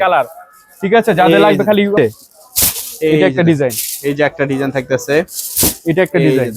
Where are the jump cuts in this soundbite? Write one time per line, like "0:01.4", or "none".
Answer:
0:02.0